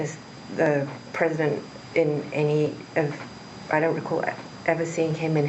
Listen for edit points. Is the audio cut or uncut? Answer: uncut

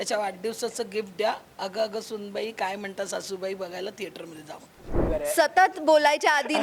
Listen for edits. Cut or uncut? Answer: cut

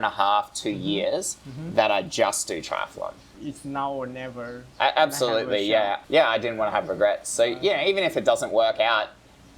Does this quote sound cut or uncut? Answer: cut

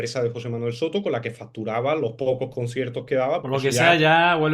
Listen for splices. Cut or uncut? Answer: cut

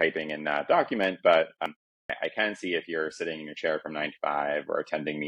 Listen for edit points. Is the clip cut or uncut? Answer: cut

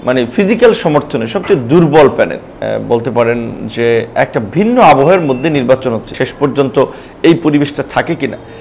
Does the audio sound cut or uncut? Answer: cut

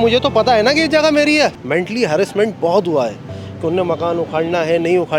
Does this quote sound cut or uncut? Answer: cut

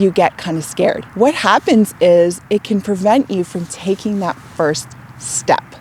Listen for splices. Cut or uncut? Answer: cut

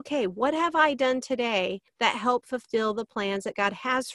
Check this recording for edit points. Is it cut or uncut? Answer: cut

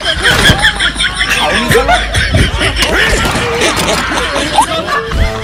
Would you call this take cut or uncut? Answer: uncut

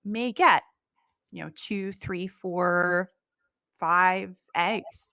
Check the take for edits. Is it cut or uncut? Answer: uncut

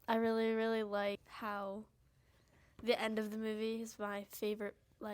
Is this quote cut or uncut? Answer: cut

